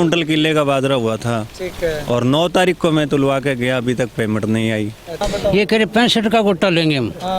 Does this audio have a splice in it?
yes; 1 cut; at 5.2 s

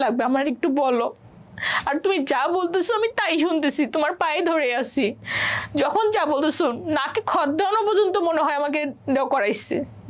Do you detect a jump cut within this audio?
no; 0 cuts

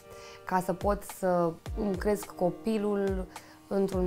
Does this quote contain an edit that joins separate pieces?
yes; 1 cut; at 1.6 s

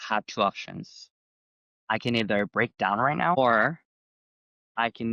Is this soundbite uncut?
no; 1 cut; at 3.4 s

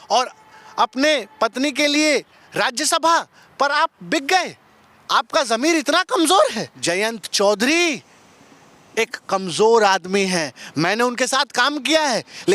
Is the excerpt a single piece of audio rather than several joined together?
no; 1 cut; at 6.7 s

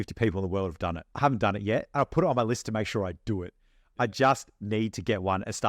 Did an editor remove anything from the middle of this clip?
yes; 2 cuts; at 1.1 s, 3.9 s

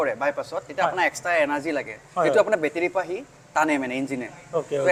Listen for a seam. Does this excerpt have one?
no; 0 cuts

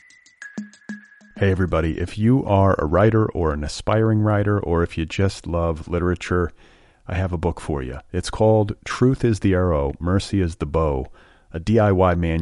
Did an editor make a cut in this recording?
yes; 1 cut; at 0.9 s

